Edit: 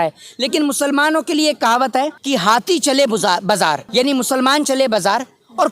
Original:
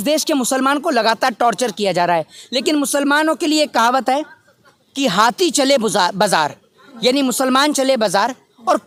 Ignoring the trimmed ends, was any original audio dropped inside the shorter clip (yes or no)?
yes